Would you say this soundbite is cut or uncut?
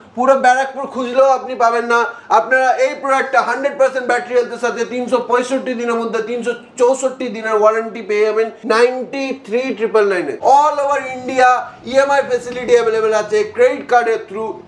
cut